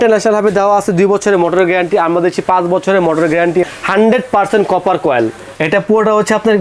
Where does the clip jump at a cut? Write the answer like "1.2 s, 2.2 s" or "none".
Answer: 3.7 s, 5.6 s